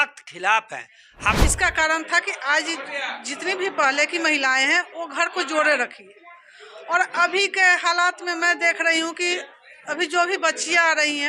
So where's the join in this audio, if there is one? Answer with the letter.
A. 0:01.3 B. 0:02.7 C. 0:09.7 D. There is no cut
A